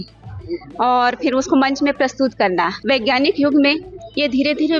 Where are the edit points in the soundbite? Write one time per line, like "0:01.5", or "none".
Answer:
0:02.8